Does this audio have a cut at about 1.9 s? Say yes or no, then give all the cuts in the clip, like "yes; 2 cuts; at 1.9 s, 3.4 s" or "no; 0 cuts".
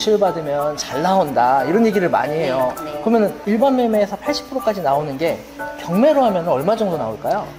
no; 1 cut; at 3.4 s